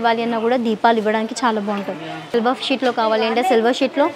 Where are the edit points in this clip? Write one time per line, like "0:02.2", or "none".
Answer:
0:02.3